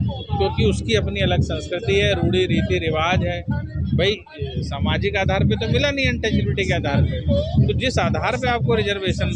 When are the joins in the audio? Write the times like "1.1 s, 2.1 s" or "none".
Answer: none